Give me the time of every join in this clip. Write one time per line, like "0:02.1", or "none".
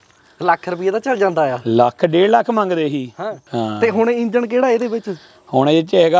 0:03.4